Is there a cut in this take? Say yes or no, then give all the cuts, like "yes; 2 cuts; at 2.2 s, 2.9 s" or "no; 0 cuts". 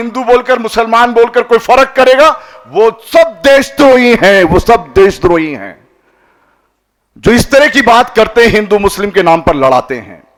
no; 0 cuts